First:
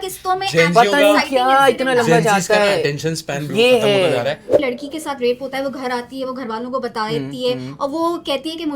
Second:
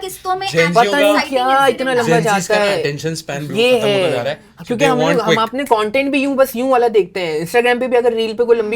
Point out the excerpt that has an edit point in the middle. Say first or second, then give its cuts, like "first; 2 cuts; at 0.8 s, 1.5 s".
first; 1 cut; at 4.5 s